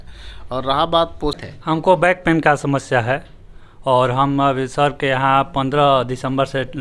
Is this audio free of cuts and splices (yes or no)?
no